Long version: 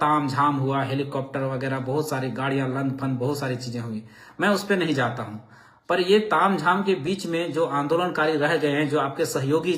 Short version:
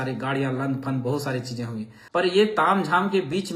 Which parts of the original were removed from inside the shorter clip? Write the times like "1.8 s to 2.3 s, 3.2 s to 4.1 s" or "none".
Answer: 4.4 s to 5.9 s